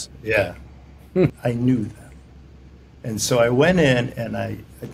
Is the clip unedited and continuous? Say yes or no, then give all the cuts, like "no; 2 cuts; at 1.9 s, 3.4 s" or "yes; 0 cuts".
no; 1 cut; at 1.4 s